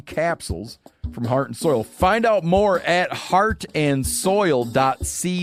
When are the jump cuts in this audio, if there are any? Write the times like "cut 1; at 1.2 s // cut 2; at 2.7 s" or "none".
none